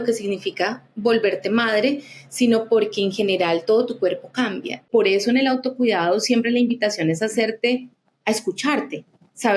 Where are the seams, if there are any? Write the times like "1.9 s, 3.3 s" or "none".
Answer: 4.8 s